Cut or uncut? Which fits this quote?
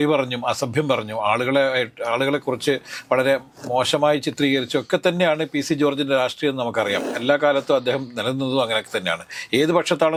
uncut